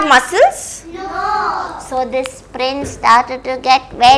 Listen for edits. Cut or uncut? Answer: uncut